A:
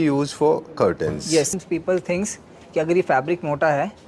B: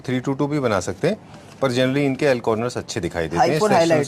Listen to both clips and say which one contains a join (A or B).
A